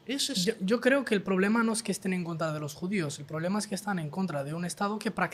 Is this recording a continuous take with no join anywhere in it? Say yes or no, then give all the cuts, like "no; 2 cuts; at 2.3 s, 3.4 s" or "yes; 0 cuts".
yes; 0 cuts